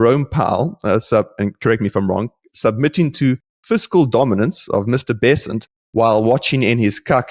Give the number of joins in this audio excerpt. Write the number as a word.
zero